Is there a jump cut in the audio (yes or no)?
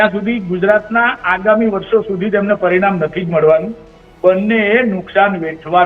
no